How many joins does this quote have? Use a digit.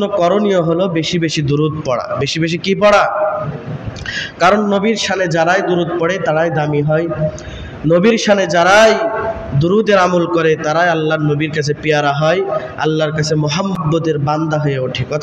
1